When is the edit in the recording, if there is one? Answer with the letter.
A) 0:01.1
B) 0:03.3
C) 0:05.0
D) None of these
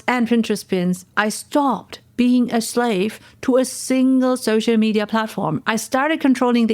A